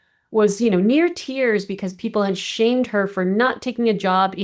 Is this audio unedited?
yes; 0 cuts

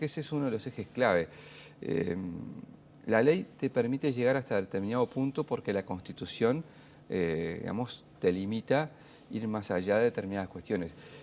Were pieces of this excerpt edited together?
no; 0 cuts

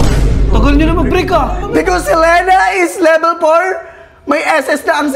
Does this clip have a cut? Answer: no; 0 cuts

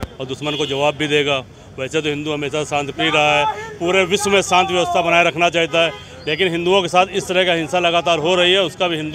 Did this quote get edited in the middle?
no; 0 cuts

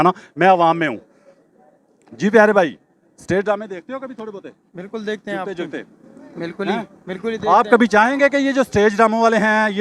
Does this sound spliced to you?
no; 0 cuts

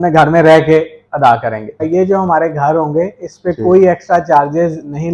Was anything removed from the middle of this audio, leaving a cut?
yes; 1 cut; at 1.8 s

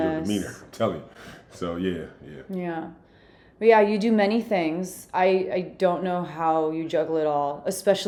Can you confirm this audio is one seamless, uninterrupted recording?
yes; 0 cuts

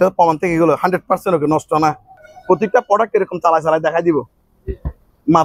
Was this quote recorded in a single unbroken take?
no; 1 cut; at 2.3 s

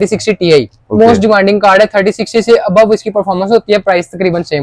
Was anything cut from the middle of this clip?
no; 0 cuts

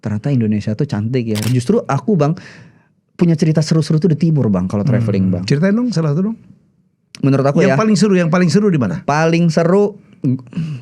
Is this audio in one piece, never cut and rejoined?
no; 1 cut; at 1.5 s

